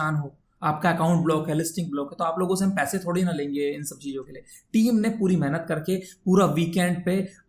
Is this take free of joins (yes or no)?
yes